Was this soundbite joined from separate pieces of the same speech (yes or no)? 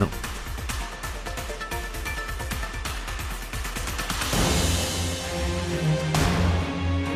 no